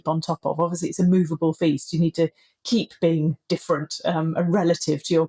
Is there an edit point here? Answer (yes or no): no